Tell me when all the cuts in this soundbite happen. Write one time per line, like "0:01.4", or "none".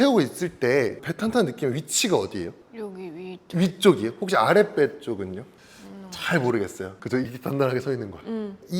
0:01.0
0:07.0